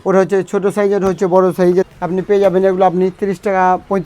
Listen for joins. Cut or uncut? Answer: cut